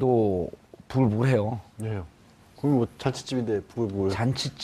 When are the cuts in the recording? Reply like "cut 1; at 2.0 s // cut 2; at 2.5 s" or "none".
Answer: cut 1; at 2.8 s